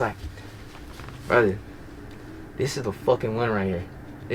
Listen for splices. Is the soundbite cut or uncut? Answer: uncut